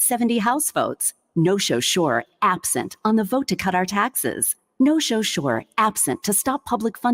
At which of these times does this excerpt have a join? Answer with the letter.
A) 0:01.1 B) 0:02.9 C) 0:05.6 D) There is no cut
D